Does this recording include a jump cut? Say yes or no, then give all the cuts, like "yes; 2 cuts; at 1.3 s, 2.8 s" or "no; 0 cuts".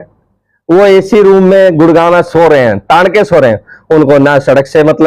no; 0 cuts